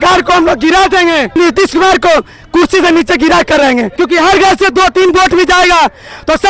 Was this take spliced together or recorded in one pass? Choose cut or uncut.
cut